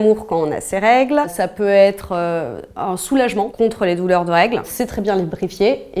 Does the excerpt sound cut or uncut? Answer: uncut